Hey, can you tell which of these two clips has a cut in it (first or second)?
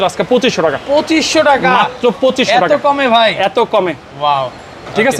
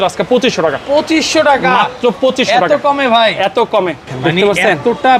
second